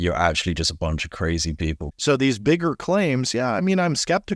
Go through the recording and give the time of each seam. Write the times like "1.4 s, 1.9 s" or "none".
1.8 s